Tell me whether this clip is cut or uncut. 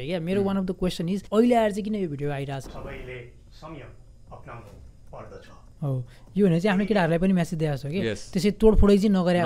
cut